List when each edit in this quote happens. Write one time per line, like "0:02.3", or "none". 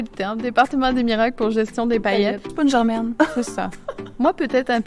0:02.5